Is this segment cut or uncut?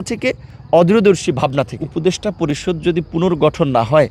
cut